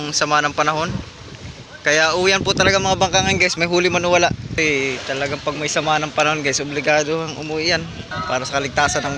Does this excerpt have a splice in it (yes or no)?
yes